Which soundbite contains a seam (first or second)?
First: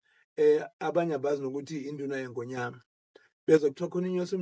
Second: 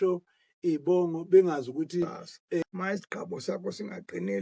second